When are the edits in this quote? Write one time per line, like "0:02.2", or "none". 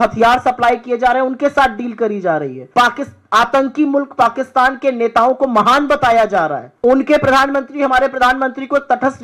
0:02.6
0:06.6